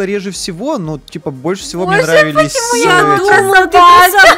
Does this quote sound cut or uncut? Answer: uncut